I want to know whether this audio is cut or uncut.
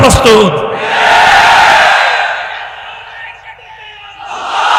uncut